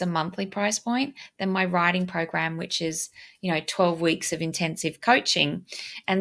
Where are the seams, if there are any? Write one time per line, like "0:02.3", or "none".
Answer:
none